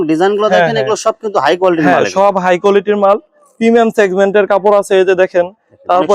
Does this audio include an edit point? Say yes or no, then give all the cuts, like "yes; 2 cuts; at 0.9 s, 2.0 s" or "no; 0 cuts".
no; 0 cuts